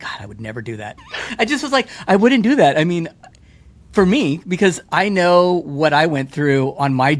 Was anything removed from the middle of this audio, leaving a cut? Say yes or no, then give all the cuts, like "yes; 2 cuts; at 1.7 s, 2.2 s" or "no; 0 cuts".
yes; 1 cut; at 1.0 s